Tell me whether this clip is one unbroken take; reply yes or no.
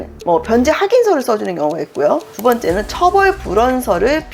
yes